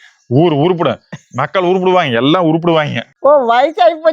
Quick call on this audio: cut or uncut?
cut